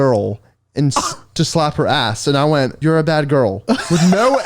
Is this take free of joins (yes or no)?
no